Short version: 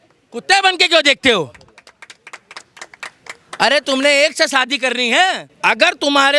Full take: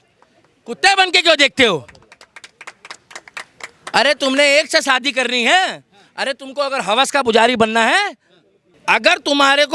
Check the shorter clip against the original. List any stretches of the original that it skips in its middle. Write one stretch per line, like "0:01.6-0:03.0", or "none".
0:05.8-0:08.7